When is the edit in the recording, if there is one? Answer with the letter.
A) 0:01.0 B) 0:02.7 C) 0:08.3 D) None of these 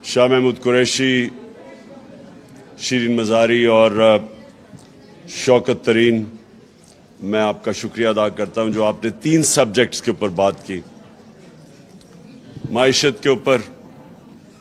A